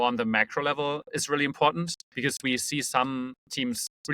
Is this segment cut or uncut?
cut